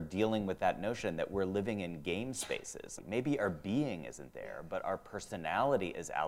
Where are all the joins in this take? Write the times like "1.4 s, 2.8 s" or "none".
3.0 s